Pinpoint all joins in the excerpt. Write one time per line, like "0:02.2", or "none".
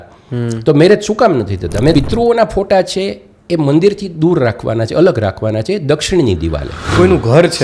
0:01.9
0:06.9